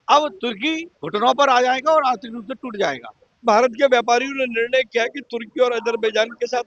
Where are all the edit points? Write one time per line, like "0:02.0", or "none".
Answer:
0:03.4